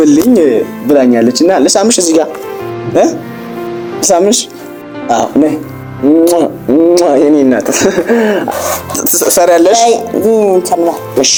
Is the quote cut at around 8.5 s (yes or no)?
no